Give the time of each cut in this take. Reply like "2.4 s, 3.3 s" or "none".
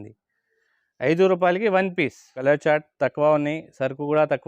2.4 s